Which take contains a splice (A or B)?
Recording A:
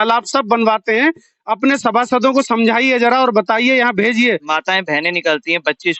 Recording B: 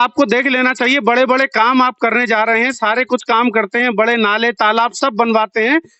A